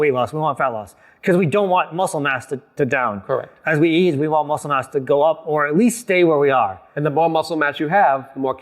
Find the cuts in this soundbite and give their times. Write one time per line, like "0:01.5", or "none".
0:03.5